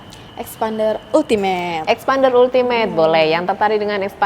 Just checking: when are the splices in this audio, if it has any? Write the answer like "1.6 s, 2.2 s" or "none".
none